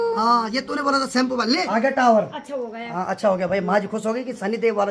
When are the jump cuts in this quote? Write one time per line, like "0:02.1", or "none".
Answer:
0:01.6